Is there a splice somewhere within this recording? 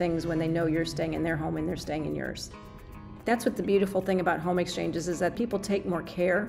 yes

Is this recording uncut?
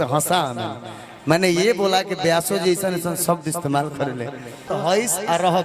no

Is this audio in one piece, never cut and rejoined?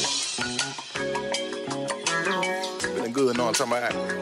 yes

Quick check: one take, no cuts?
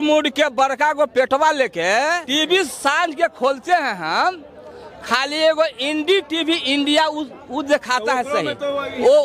no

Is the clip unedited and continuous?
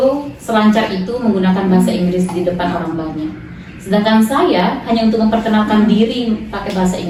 yes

